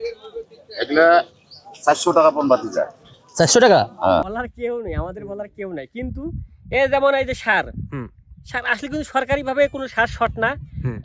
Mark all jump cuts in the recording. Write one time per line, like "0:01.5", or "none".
0:04.3